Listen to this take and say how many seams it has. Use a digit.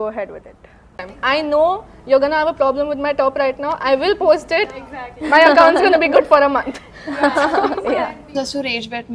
1